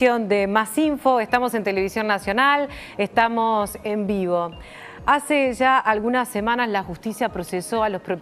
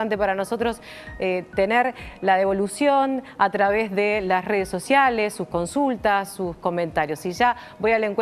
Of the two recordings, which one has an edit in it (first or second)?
second